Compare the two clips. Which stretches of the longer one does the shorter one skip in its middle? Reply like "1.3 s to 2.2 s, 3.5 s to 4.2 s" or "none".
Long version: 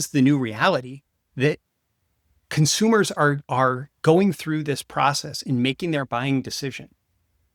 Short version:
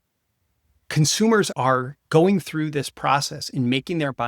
3.1 s to 3.4 s